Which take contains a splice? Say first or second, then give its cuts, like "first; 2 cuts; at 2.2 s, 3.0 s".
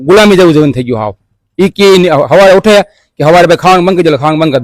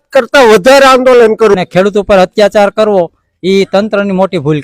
second; 1 cut; at 1.5 s